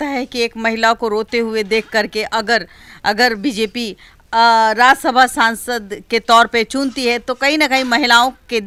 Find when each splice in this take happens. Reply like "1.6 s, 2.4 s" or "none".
none